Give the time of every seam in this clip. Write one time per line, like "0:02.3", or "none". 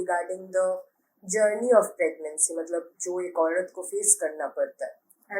none